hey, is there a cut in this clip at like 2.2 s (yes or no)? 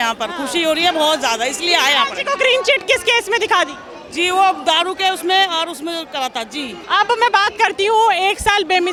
no